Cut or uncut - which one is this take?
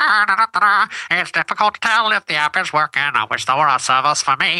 uncut